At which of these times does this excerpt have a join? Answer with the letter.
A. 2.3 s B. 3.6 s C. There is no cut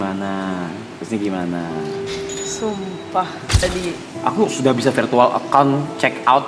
B